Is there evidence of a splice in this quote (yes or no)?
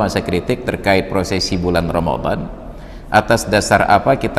no